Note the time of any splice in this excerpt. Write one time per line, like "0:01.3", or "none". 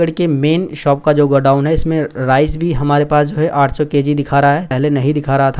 0:04.7

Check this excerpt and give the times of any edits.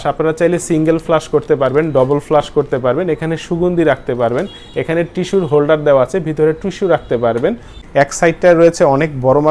0:07.7

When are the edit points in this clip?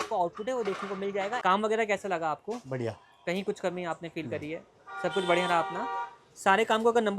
0:01.4

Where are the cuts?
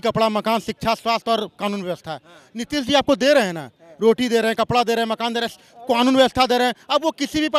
none

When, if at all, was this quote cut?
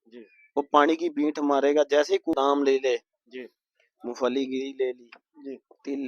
0:02.4

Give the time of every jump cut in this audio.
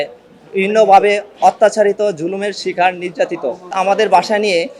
0:03.7

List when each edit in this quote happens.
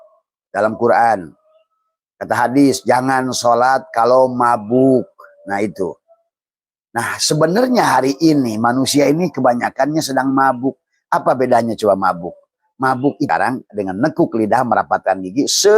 0:13.3

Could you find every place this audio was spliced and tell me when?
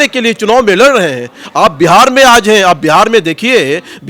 none

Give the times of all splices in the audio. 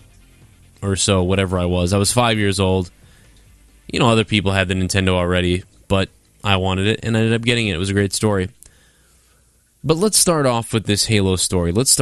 0:06.4

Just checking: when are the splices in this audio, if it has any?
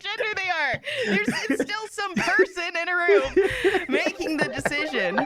none

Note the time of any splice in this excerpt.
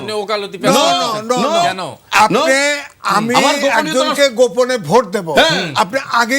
none

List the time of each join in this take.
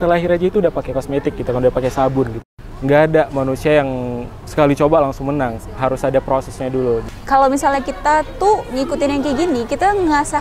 0:02.4
0:07.1

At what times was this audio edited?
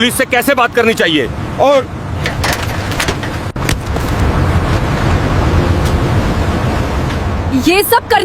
0:03.5

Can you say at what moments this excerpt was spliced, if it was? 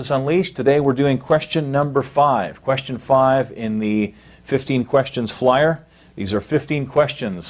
none

